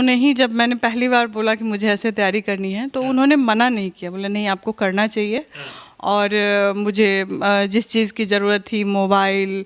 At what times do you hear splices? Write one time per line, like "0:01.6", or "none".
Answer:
none